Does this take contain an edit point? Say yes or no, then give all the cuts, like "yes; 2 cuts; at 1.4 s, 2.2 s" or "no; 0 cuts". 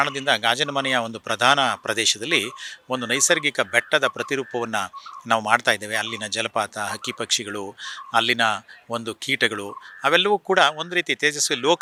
no; 0 cuts